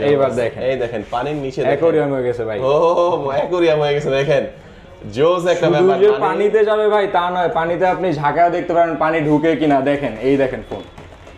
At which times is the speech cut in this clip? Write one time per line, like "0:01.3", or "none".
none